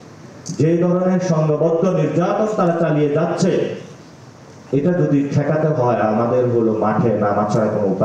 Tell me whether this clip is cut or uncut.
uncut